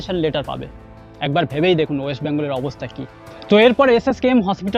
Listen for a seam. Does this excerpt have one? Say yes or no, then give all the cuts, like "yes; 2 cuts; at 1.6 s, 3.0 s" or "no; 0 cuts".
no; 0 cuts